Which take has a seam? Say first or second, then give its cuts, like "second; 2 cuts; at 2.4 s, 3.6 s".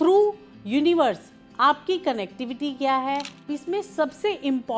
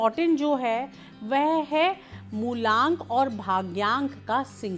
first; 1 cut; at 3.5 s